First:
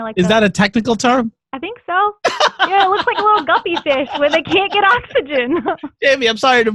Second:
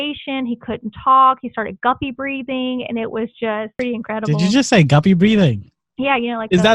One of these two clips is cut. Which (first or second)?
second